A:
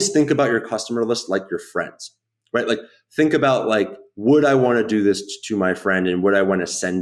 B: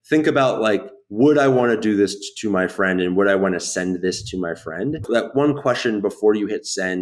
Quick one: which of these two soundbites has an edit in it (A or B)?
B